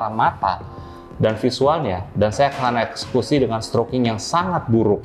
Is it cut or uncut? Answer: uncut